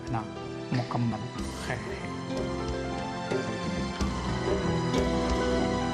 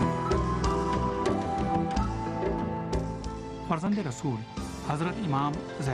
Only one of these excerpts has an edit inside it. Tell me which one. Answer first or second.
second